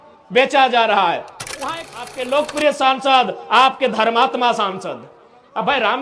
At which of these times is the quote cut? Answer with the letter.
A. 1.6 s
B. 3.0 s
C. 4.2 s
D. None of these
A